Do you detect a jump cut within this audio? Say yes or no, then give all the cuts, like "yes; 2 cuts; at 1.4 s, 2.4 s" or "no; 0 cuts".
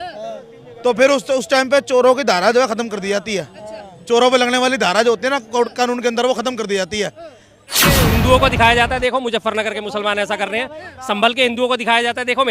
yes; 1 cut; at 8.0 s